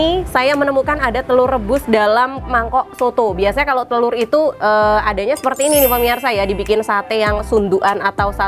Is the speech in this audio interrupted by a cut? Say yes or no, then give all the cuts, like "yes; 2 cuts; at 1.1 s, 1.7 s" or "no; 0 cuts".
no; 0 cuts